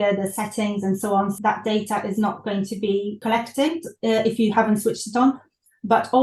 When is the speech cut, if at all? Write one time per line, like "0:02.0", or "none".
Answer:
0:01.3
0:03.2